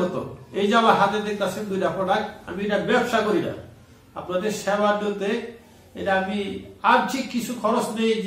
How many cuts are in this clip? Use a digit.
0